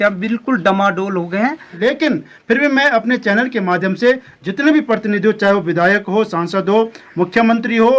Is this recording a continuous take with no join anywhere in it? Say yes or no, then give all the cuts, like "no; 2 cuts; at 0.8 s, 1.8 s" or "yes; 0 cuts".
no; 1 cut; at 1.8 s